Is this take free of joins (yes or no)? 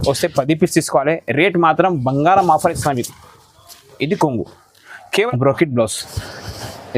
no